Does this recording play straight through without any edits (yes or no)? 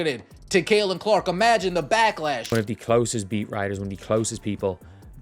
no